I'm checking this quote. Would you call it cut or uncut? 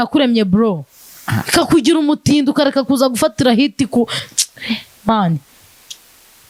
uncut